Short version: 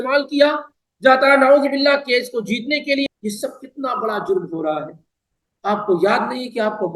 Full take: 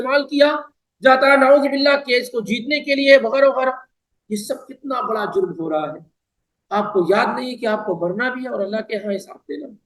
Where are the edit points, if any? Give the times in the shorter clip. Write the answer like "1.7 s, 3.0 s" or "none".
3.0 s